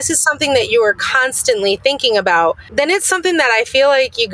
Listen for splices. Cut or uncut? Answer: cut